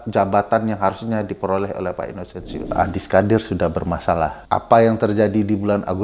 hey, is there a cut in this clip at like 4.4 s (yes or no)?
yes